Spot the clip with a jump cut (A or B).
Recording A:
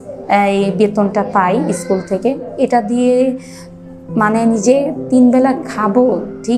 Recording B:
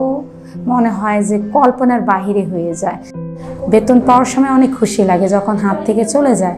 B